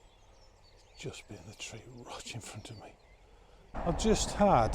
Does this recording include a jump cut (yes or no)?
yes